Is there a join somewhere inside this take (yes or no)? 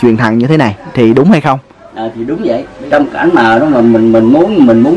yes